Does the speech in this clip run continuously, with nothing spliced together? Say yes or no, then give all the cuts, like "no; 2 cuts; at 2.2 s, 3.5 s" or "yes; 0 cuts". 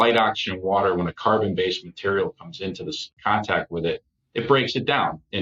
no; 1 cut; at 3.1 s